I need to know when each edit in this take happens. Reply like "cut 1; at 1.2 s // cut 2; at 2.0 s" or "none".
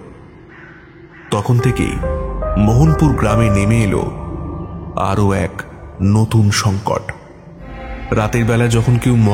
cut 1; at 7.9 s